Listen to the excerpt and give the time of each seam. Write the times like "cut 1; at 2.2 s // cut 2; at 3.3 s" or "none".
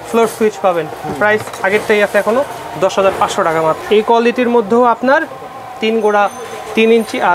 none